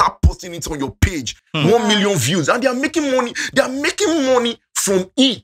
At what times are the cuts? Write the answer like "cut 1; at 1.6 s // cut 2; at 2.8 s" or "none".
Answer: cut 1; at 1.4 s